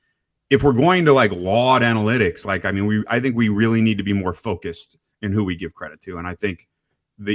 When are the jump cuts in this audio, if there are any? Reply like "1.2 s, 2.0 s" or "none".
none